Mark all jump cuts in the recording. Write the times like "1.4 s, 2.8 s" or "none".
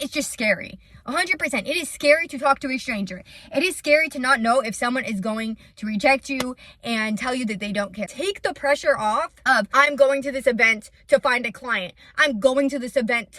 8.1 s